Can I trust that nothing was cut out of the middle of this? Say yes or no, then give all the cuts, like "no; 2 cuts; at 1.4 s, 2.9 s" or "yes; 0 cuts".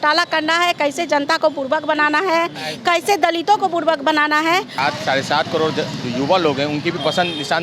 no; 1 cut; at 4.7 s